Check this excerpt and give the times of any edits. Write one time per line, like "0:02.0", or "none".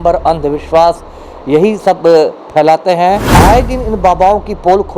0:03.3